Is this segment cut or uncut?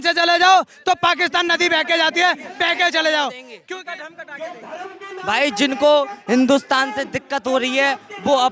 uncut